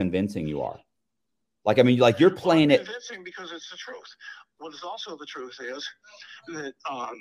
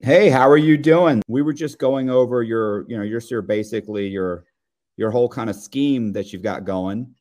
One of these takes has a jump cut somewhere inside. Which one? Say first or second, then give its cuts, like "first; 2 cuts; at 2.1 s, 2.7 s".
second; 1 cut; at 1.3 s